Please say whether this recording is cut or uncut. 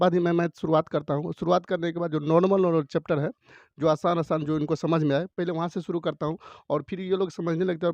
uncut